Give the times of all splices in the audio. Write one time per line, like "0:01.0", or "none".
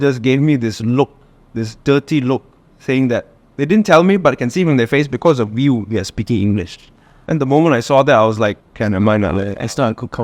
0:08.7